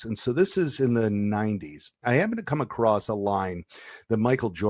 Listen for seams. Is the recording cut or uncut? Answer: cut